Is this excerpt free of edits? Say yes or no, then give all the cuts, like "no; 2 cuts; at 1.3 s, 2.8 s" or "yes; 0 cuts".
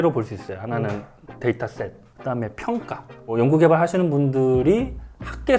no; 2 cuts; at 2.0 s, 3.3 s